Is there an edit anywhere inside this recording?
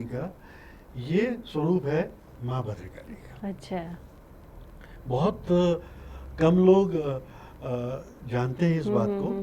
no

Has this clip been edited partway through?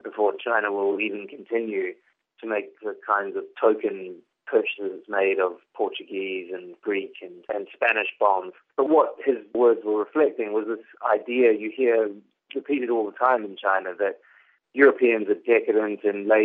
yes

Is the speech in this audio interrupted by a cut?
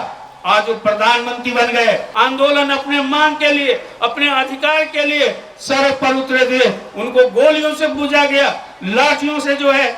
yes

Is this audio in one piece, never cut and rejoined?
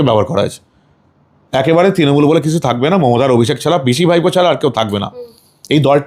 yes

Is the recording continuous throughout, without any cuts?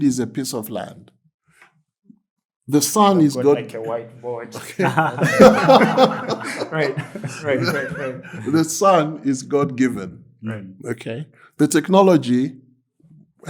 yes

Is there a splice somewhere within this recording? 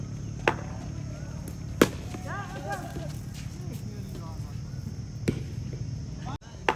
no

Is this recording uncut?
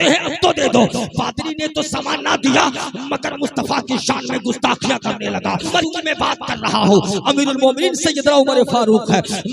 no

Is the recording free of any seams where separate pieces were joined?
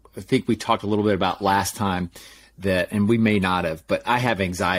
yes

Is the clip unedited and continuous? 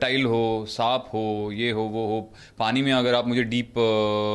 yes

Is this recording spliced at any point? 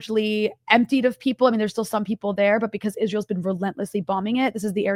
no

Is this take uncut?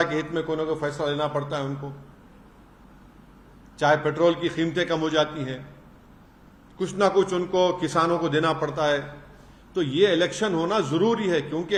yes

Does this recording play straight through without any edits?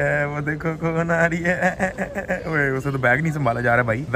yes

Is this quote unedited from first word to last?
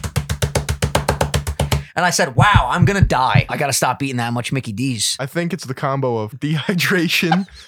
no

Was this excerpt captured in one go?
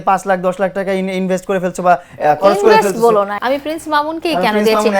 no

